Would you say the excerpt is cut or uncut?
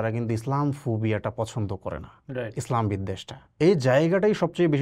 cut